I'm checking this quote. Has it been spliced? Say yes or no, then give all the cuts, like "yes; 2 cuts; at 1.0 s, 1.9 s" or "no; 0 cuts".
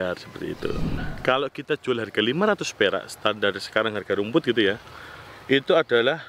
yes; 1 cut; at 1.0 s